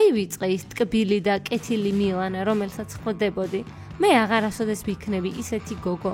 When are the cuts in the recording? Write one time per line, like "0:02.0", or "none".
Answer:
none

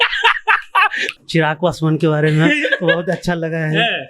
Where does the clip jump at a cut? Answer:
0:01.1

